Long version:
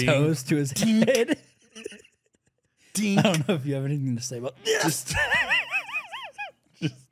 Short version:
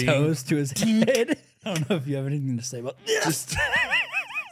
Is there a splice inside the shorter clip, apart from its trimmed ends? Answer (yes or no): yes